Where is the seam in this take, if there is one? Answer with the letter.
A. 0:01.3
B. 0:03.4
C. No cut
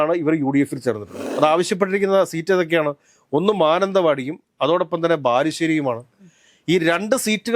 A